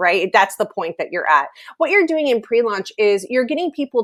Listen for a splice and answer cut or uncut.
uncut